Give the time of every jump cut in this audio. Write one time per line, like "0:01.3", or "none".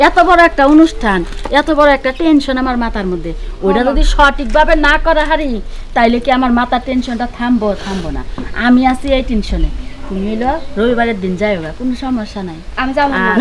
none